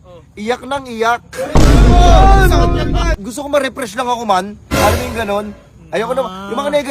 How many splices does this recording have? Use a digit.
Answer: 1